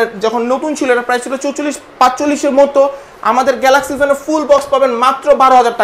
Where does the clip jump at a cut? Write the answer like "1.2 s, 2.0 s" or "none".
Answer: none